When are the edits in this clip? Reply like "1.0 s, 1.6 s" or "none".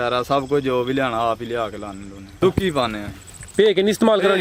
2.4 s

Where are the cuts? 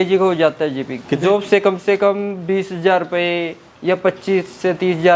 1.1 s

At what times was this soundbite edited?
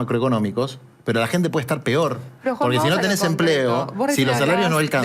none

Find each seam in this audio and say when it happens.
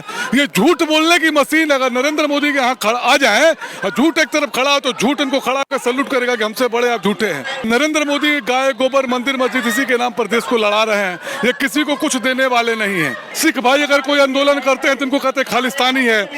7.7 s, 13.3 s

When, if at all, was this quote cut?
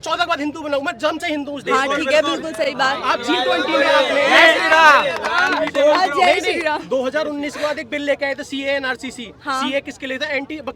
none

